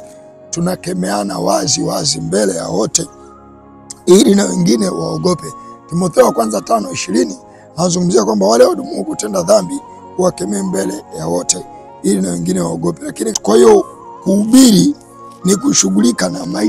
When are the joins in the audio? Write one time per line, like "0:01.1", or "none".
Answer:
0:13.3